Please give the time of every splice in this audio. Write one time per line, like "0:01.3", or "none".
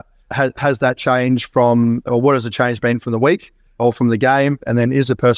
0:03.8

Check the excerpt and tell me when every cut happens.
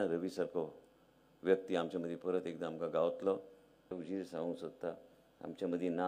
0:04.0

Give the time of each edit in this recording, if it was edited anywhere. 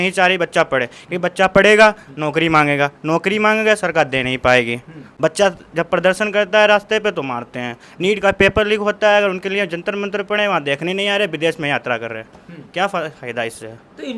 none

